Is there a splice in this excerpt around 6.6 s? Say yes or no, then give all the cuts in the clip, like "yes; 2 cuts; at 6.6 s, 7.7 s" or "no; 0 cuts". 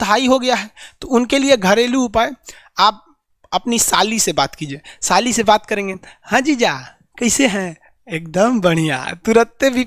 no; 0 cuts